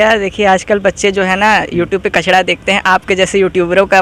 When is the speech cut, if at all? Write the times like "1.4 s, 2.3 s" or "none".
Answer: none

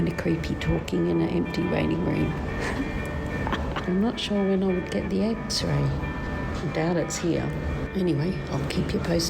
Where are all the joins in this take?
3.8 s, 6.3 s, 7.9 s

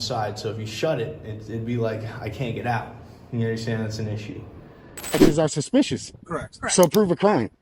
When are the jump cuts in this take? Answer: 5.1 s

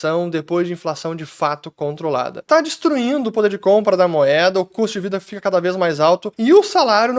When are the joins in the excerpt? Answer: 2.4 s, 6.3 s

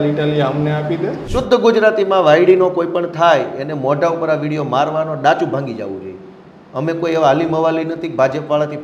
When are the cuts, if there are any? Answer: 1.2 s

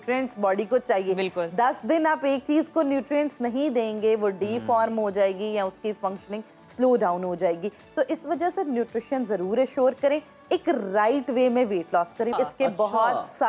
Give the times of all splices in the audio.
12.3 s

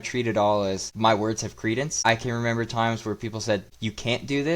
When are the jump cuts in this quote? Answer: 0.9 s, 2.0 s, 3.7 s

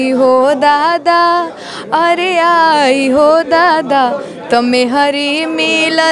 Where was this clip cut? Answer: none

